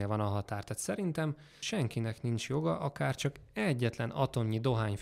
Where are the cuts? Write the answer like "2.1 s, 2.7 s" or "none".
1.6 s